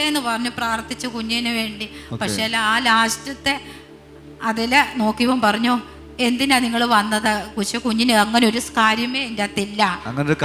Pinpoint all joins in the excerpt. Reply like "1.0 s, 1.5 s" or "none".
none